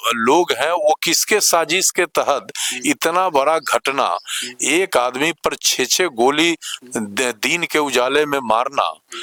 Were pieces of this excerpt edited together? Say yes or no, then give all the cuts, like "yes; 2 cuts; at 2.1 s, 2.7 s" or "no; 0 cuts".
no; 0 cuts